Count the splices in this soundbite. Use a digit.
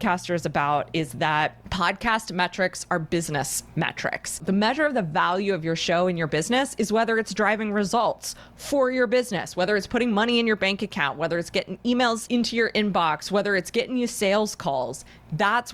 3